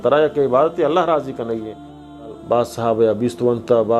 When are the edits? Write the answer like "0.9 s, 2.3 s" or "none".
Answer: 2.2 s